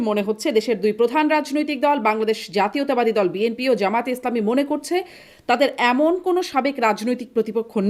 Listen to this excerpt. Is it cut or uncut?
uncut